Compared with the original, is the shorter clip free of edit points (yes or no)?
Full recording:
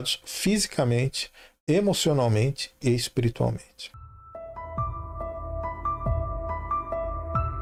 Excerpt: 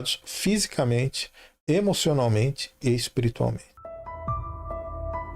no